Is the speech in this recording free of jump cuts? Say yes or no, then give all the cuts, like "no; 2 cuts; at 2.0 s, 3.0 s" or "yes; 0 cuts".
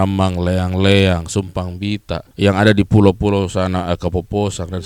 no; 1 cut; at 2.3 s